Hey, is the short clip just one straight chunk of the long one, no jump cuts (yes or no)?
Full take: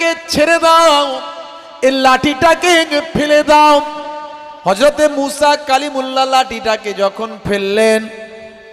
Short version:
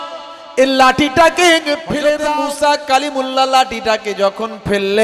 no